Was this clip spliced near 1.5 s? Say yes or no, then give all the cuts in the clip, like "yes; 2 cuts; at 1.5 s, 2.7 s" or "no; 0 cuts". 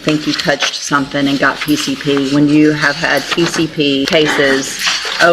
no; 1 cut; at 4.1 s